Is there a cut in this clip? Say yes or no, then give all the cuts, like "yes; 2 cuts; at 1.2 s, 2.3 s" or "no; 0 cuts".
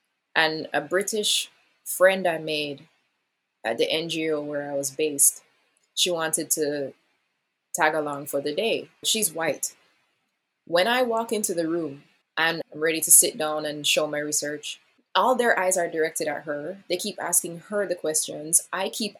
no; 0 cuts